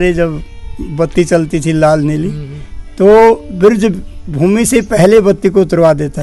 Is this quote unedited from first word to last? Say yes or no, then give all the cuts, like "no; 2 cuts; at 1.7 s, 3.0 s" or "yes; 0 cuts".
yes; 0 cuts